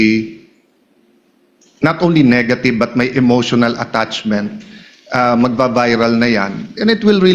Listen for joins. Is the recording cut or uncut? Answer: uncut